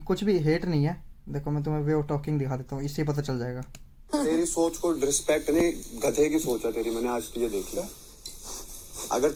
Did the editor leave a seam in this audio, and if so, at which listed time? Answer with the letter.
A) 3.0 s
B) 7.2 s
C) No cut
C